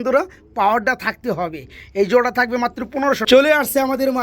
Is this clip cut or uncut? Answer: cut